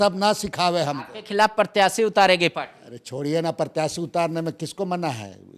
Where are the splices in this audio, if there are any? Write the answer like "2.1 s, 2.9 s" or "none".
none